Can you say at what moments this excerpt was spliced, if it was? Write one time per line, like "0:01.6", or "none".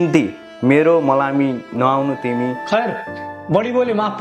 0:02.6